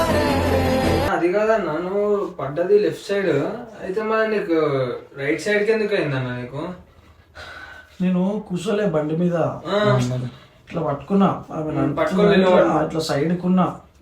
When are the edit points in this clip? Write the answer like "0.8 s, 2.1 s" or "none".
1.1 s